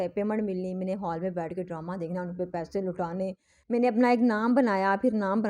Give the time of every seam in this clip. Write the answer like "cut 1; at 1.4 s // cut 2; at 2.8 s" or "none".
cut 1; at 3.5 s